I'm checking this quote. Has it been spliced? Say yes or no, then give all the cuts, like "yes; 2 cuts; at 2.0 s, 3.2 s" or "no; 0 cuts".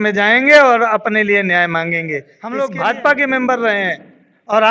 yes; 1 cut; at 2.3 s